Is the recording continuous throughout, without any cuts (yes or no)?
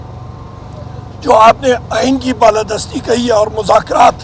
yes